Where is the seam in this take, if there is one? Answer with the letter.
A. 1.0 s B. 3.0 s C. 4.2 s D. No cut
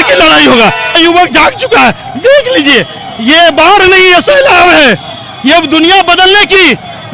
A